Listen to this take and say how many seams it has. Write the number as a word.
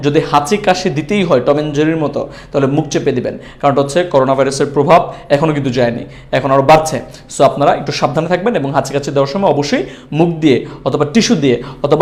zero